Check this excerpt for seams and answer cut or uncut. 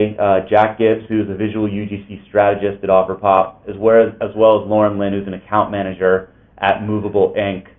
cut